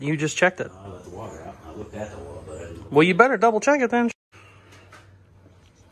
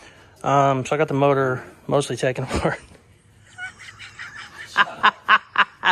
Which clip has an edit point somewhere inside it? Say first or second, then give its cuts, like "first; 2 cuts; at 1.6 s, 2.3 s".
first; 1 cut; at 4.1 s